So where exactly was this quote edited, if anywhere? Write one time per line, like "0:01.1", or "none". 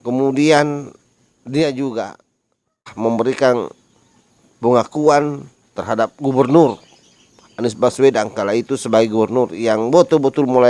0:02.8